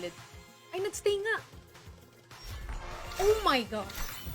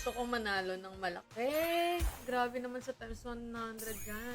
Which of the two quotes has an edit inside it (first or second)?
first